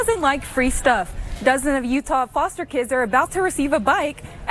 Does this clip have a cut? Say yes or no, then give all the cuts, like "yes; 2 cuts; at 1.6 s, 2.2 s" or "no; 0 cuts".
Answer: no; 0 cuts